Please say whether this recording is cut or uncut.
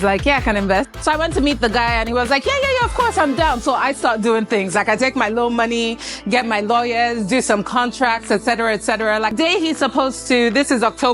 cut